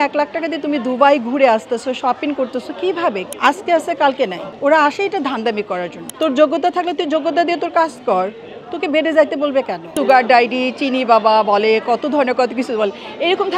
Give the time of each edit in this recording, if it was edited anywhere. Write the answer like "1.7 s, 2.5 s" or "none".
3.3 s, 4.4 s, 6.0 s, 9.9 s

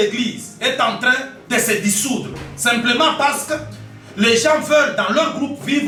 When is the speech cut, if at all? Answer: none

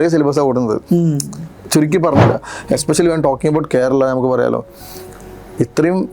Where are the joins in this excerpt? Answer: 2.3 s

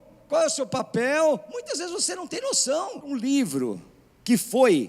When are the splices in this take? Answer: 3.2 s

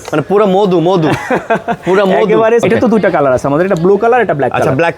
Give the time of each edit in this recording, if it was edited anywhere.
2.6 s

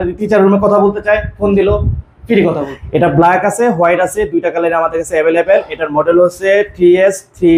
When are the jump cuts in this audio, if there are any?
2.6 s

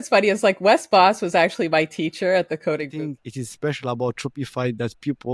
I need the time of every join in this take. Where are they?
2.9 s

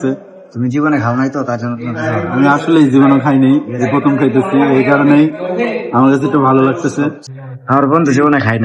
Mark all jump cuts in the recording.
7.2 s

